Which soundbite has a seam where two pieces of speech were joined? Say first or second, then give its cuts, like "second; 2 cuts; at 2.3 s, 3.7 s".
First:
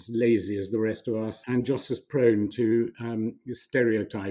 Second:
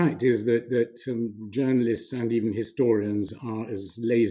first; 1 cut; at 1.3 s